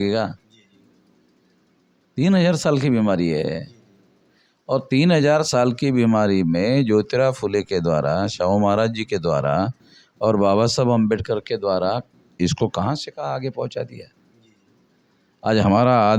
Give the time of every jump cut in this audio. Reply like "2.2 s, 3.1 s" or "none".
none